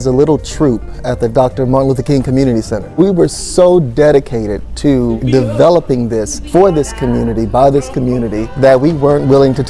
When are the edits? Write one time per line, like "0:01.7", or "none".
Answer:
0:02.8
0:05.2
0:06.4
0:08.4